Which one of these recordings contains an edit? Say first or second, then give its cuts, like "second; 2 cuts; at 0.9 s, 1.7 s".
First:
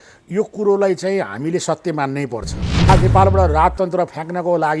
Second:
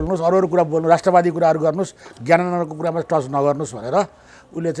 first; 1 cut; at 2.9 s